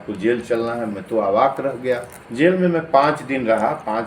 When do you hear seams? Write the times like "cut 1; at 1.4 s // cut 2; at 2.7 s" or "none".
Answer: cut 1; at 2.2 s